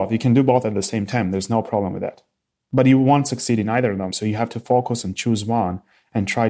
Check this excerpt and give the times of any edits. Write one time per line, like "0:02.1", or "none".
0:04.1